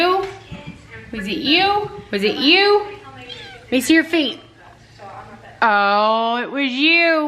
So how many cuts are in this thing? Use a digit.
0